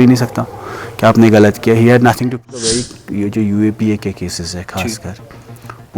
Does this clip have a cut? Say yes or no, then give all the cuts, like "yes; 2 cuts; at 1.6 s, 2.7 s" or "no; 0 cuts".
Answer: yes; 1 cut; at 2.3 s